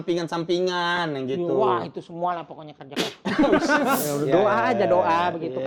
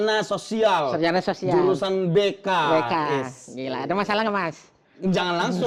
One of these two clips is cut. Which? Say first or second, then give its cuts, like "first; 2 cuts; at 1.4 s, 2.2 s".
first; 1 cut; at 4.1 s